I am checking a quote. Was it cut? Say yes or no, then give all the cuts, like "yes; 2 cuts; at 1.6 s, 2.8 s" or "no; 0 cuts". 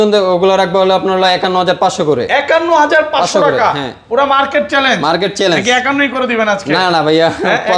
no; 0 cuts